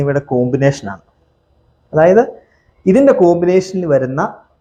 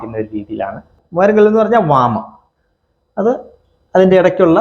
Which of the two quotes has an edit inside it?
second; 1 cut; at 0.9 s

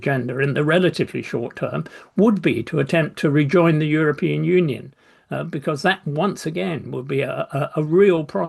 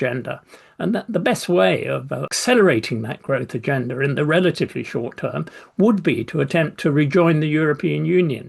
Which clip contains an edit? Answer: second; 1 cut; at 2.3 s

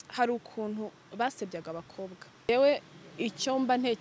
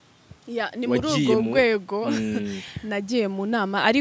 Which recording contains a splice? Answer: first; 1 cut; at 2.5 s

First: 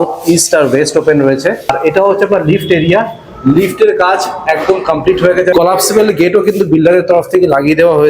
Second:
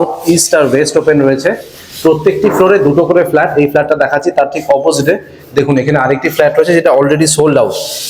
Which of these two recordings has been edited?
first; 2 cuts; at 1.8 s, 5.5 s

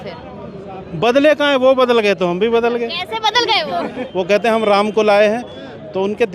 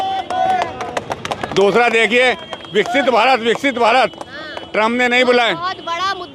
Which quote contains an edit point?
first; 1 cut; at 4.0 s

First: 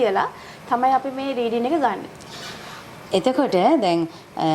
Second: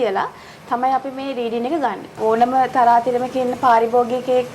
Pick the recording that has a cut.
second; 1 cut; at 2.2 s

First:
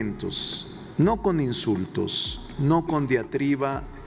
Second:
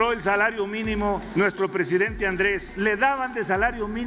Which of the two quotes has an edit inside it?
second; 2 cuts; at 1.3 s, 2.7 s

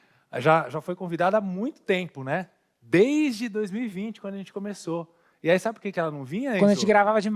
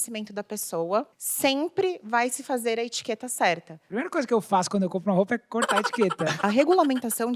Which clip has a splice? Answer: second; 3 cuts; at 1.2 s, 3.8 s, 6.3 s

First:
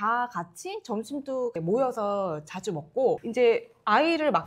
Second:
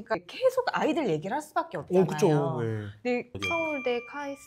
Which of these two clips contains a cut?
second; 1 cut; at 3.3 s

